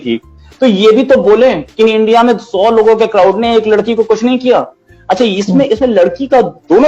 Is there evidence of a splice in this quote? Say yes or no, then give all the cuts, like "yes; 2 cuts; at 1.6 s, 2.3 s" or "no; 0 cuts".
no; 0 cuts